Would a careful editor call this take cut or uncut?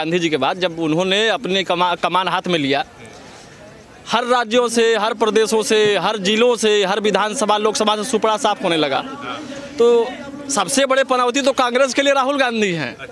uncut